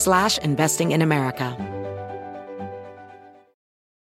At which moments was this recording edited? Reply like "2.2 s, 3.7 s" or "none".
1.5 s

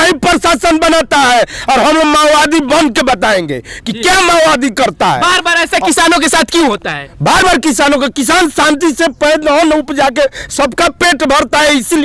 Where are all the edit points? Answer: none

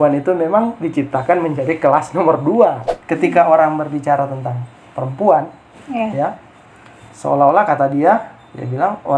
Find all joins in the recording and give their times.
2.9 s

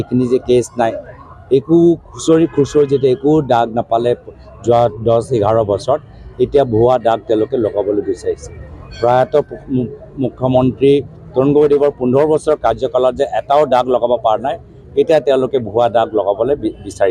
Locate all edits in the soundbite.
none

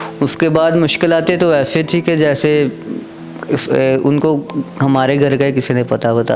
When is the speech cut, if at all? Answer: none

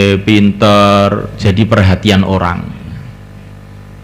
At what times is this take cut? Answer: 1.3 s

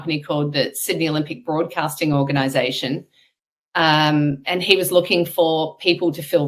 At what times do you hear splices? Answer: none

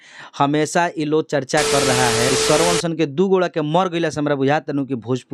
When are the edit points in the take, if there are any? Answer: 2.3 s

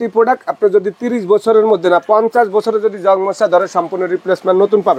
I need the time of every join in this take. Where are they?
none

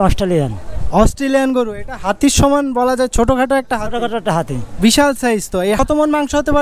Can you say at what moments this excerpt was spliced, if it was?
none

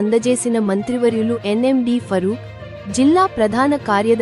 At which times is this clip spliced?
none

